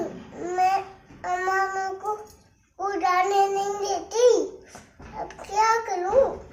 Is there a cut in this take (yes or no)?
no